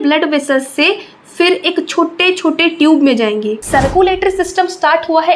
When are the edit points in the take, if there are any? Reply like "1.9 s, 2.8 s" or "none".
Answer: 3.6 s